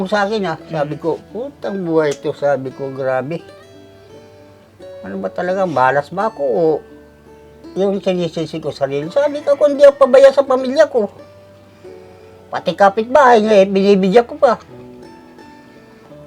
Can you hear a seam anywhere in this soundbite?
no; 0 cuts

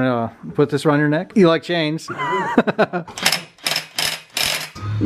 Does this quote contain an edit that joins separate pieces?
no; 0 cuts

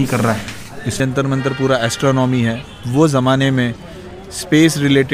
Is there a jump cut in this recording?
yes; 1 cut; at 1.0 s

